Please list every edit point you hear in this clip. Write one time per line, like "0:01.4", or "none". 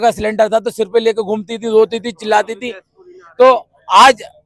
none